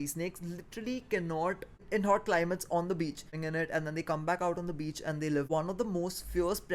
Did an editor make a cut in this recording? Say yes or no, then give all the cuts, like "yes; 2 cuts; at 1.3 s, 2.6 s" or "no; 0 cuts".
yes; 3 cuts; at 1.8 s, 3.4 s, 5.5 s